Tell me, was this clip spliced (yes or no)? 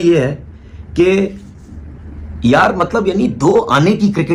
no